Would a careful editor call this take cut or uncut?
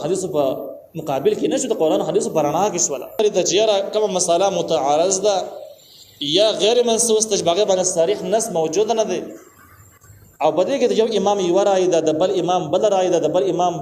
cut